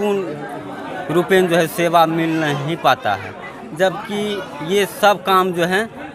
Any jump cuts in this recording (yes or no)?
no